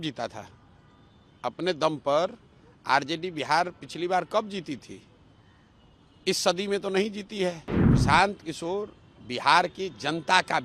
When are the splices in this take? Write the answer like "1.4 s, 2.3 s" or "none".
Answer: 7.7 s